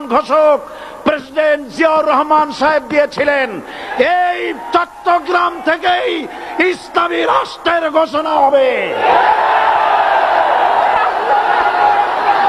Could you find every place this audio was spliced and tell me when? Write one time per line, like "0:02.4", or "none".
none